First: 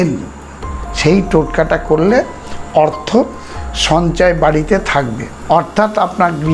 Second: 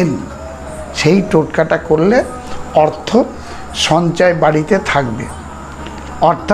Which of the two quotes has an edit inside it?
first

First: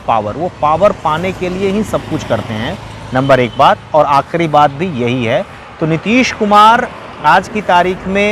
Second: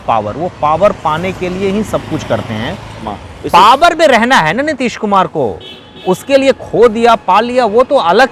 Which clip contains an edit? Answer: second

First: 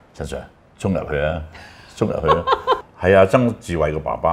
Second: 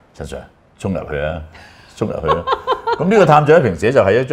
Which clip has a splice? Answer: first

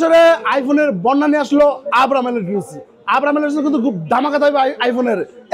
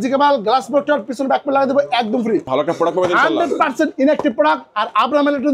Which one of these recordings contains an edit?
second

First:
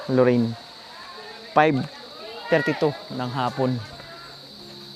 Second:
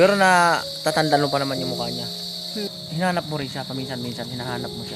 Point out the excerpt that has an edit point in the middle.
second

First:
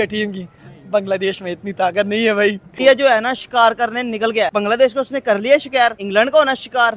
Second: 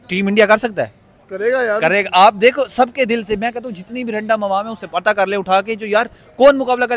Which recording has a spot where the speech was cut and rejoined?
first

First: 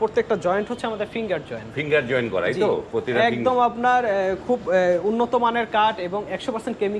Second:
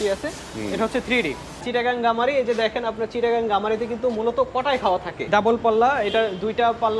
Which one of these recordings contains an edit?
second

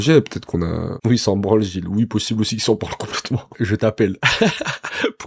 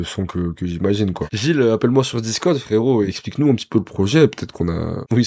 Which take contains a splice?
second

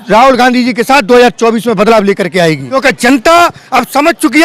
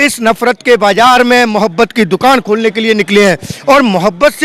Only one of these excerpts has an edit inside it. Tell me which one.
first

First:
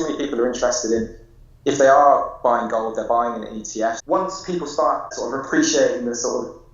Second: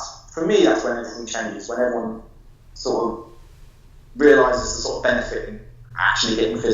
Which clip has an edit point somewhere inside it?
first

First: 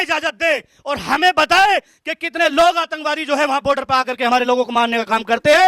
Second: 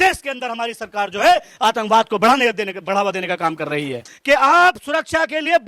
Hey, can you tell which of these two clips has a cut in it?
second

